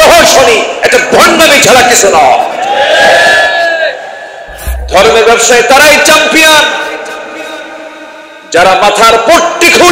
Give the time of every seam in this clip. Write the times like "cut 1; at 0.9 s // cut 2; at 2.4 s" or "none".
cut 1; at 4.7 s